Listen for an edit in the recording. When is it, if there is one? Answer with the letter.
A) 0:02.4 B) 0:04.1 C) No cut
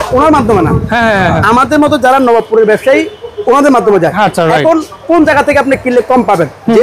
C